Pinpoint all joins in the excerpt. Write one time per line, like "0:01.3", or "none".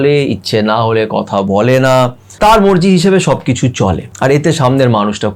0:02.3
0:04.1